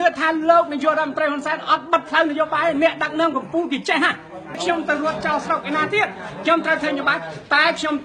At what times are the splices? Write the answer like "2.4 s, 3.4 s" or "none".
4.6 s